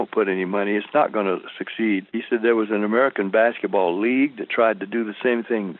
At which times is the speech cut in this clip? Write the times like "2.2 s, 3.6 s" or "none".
2.1 s